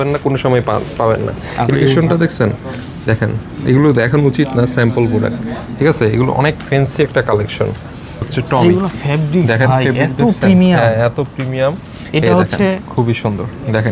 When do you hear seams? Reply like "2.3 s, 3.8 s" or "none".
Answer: 1.7 s, 8.3 s